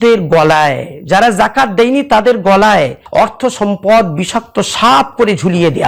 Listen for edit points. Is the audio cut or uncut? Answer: cut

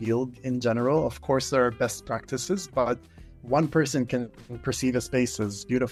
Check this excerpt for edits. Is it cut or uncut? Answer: uncut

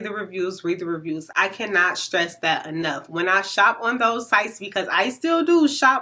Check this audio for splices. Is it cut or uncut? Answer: uncut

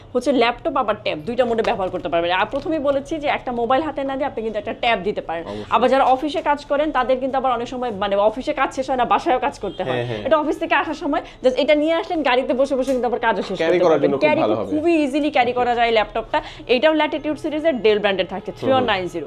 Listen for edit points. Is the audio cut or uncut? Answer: uncut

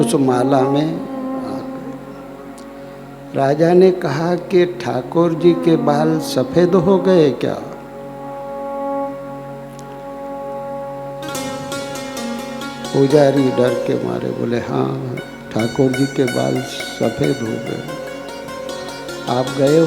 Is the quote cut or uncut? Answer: uncut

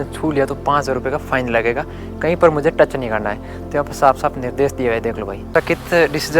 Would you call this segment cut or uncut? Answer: cut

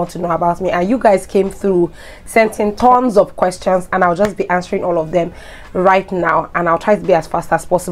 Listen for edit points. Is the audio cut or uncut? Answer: uncut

